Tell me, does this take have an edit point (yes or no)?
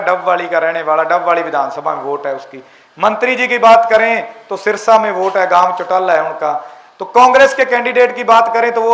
no